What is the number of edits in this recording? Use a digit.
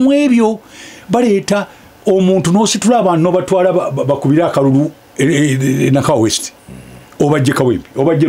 0